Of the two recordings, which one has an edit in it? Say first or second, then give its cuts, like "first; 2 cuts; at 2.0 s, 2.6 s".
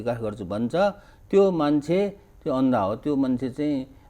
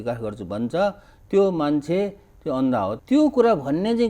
second; 1 cut; at 3.0 s